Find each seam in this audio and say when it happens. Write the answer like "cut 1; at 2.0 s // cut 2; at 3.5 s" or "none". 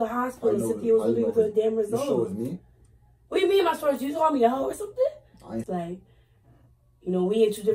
cut 1; at 5.7 s